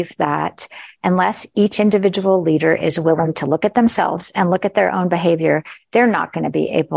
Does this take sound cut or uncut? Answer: uncut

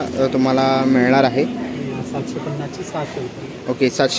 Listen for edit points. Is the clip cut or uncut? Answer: uncut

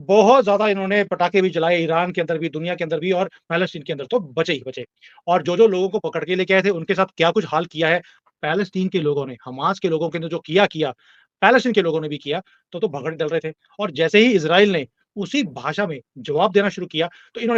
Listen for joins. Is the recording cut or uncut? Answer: uncut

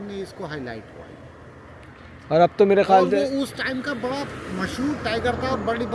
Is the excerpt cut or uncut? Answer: uncut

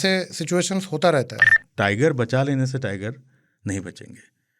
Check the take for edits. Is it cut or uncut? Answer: cut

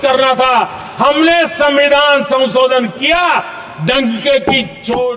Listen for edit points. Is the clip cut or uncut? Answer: uncut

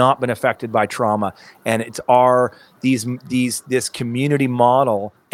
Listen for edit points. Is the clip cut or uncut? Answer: uncut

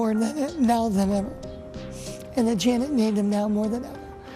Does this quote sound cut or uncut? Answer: uncut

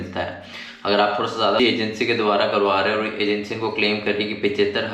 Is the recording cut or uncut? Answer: cut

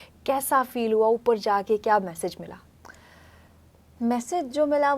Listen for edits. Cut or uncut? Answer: uncut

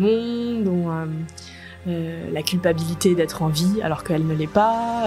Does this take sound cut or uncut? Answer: uncut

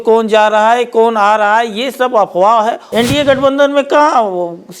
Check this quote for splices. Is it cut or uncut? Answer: cut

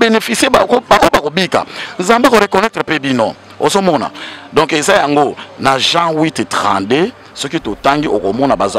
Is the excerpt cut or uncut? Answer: uncut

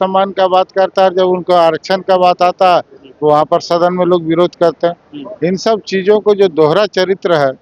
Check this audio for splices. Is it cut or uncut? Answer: uncut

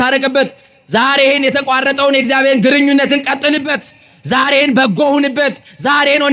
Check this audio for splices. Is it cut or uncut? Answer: uncut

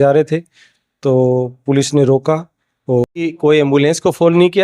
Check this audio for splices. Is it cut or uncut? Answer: cut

